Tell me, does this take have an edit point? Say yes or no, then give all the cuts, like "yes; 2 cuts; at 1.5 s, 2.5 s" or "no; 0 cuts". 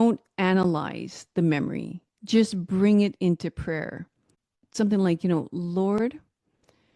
yes; 1 cut; at 4.7 s